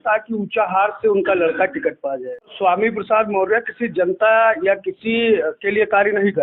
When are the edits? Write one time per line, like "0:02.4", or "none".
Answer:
0:02.5